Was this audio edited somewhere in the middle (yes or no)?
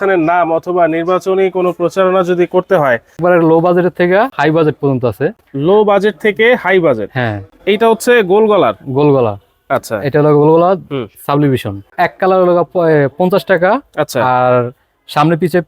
yes